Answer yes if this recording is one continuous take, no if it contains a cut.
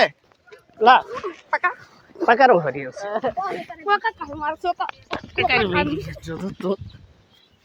yes